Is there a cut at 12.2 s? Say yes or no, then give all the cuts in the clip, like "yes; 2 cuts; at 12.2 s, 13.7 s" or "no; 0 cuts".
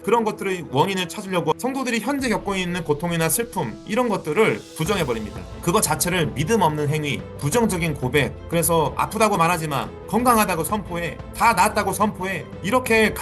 no; 2 cuts; at 1.5 s, 4.7 s